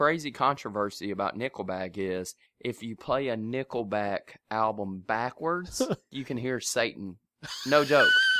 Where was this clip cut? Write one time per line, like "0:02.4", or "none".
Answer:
0:06.2